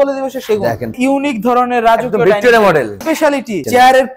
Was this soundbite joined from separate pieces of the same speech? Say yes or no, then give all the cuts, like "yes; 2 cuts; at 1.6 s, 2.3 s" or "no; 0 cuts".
yes; 2 cuts; at 0.9 s, 3.2 s